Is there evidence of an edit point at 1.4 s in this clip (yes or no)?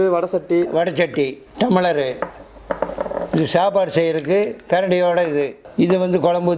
yes